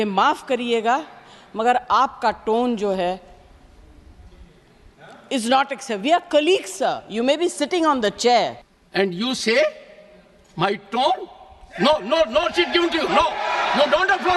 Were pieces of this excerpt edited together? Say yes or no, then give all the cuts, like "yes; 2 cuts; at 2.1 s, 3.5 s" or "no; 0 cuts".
yes; 1 cut; at 8.6 s